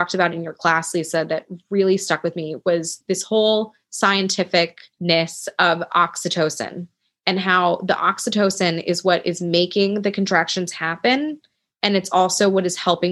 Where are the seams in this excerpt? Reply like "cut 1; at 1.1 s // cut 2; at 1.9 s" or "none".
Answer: cut 1; at 3.0 s // cut 2; at 4.9 s

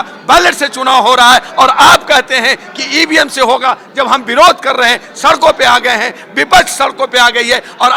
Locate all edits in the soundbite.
none

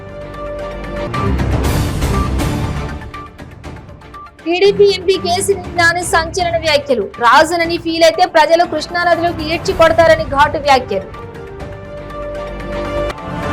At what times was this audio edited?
cut 1; at 1.0 s

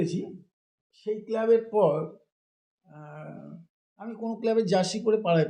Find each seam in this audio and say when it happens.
none

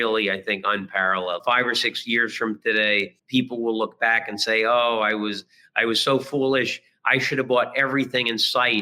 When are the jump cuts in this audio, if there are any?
cut 1; at 1.4 s // cut 2; at 3.2 s

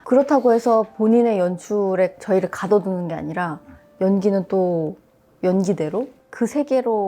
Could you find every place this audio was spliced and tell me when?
none

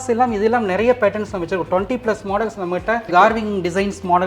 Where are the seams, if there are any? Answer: cut 1; at 3.1 s

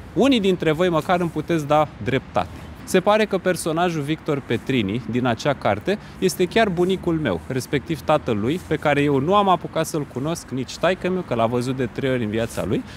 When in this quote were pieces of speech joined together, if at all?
cut 1; at 2.7 s

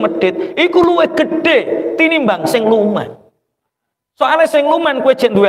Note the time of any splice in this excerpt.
none

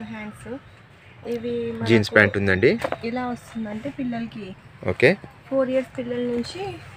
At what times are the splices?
none

